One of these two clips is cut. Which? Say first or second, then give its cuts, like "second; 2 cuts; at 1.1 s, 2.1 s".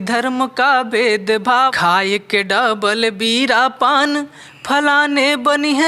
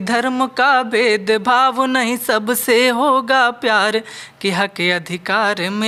first; 1 cut; at 1.7 s